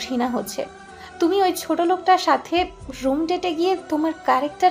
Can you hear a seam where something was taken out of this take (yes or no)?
no